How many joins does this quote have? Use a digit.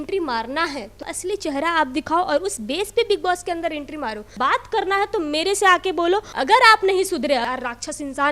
4